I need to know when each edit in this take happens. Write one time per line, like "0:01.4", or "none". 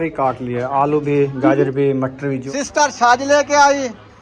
0:02.4